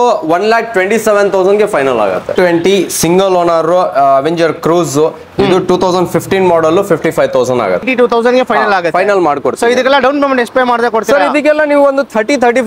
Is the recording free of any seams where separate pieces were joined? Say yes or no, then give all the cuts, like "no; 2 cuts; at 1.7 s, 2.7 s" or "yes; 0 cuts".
no; 2 cuts; at 2.3 s, 7.9 s